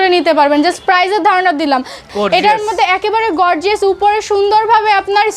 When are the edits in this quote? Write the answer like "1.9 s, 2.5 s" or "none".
2.1 s

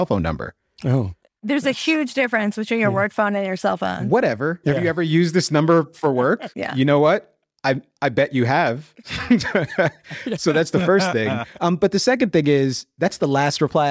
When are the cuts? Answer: none

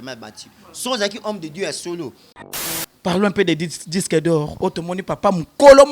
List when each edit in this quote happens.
2.6 s

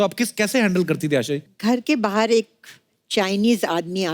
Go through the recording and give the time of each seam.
1.5 s

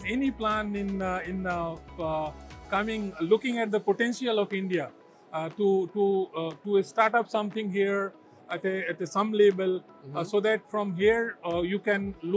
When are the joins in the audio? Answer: none

